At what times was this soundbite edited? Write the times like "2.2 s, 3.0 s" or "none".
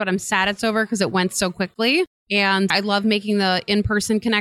none